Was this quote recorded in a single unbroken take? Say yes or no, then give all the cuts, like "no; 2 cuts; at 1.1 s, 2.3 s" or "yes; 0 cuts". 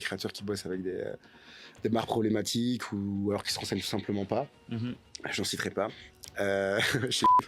yes; 0 cuts